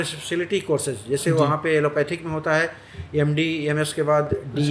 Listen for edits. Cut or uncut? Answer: uncut